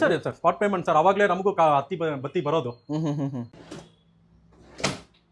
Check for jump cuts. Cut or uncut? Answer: cut